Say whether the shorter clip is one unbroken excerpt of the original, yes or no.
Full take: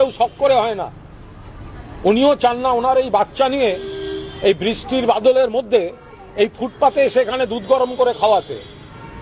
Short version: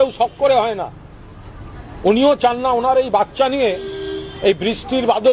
yes